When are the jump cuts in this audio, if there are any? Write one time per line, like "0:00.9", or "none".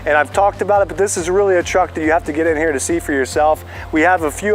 none